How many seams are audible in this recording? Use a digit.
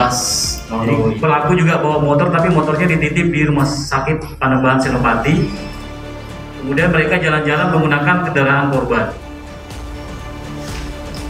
1